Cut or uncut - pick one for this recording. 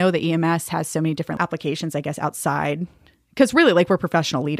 cut